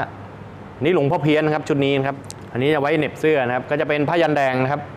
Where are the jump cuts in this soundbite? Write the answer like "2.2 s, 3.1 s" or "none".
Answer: 2.1 s